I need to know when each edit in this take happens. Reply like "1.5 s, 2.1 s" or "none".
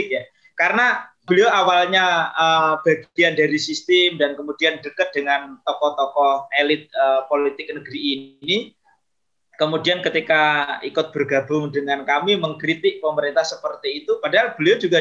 1.2 s